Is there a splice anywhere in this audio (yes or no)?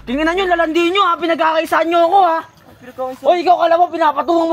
no